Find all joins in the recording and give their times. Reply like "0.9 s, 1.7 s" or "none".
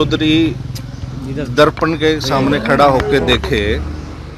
none